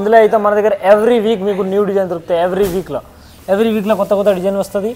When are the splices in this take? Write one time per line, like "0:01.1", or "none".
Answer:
none